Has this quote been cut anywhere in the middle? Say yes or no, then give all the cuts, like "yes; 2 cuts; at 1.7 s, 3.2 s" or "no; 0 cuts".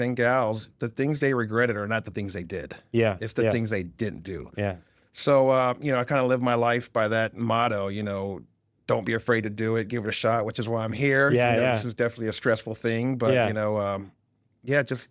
no; 0 cuts